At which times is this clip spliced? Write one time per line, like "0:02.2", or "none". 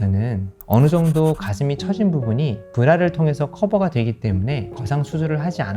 0:04.8